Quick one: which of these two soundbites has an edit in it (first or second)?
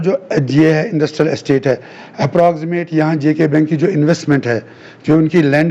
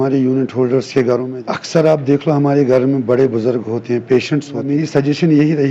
second